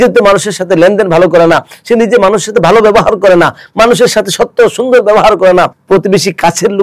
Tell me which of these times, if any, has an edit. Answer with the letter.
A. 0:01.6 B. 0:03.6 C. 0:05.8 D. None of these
C